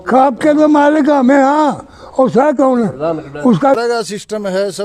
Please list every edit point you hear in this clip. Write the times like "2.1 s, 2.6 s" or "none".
3.8 s